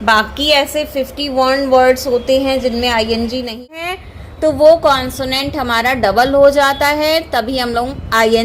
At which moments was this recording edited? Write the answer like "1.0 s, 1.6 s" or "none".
3.6 s